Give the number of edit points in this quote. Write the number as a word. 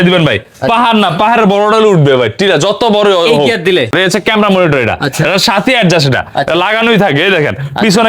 one